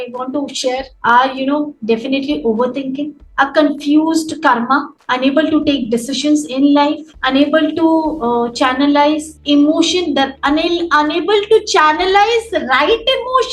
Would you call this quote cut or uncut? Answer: cut